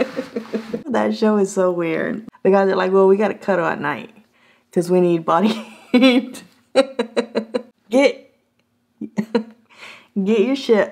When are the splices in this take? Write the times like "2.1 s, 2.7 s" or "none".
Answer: 0.9 s, 2.1 s